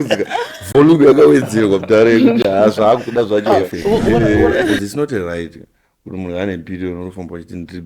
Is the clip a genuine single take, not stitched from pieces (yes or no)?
no